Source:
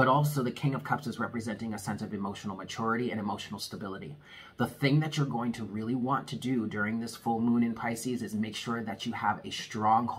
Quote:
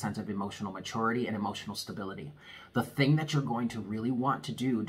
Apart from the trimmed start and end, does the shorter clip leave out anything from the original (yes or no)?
no